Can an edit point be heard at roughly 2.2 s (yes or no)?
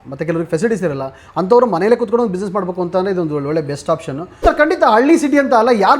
no